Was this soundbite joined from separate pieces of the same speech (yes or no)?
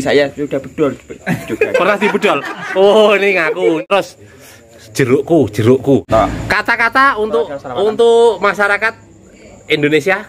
yes